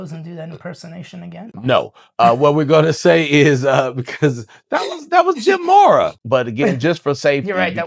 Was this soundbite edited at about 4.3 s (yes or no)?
no